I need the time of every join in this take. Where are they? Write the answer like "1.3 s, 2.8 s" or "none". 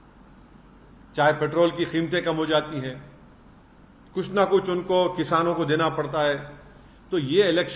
none